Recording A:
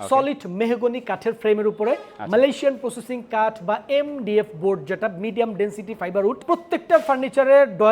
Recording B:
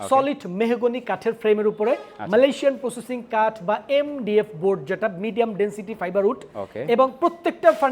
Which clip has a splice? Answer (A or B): A